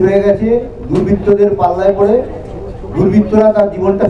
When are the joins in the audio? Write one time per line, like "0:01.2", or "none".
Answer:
none

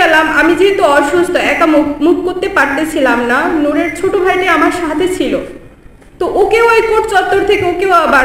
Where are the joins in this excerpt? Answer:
none

